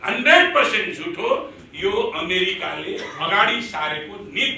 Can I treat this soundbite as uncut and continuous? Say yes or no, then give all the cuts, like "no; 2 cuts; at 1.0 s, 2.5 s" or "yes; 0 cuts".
yes; 0 cuts